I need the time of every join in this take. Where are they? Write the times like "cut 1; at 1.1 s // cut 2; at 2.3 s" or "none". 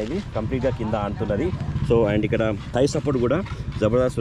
none